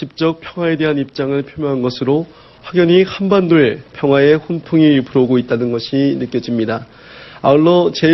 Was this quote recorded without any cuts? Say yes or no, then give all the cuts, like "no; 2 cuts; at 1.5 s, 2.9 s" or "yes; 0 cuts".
yes; 0 cuts